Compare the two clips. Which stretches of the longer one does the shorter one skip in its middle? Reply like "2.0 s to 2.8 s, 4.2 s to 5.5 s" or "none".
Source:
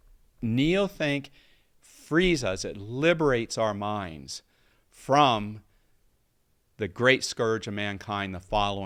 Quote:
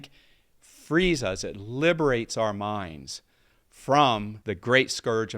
5.5 s to 6.7 s